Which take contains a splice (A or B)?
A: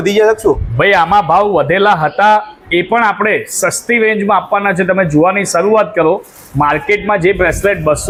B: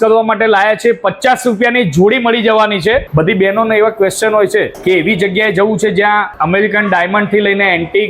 B